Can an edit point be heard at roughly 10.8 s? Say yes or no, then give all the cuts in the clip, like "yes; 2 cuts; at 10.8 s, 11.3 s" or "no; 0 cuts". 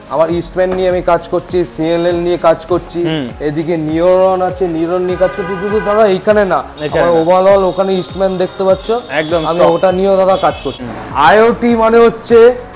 yes; 1 cut; at 10.8 s